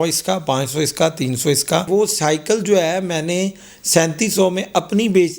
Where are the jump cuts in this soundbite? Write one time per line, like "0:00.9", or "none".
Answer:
0:01.9